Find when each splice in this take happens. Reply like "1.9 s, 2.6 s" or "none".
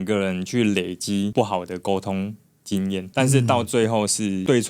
3.1 s